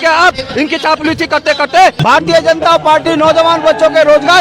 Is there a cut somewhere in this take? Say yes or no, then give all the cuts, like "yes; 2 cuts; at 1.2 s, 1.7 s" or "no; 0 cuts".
yes; 1 cut; at 2.0 s